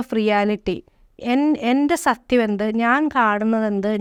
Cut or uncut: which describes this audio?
uncut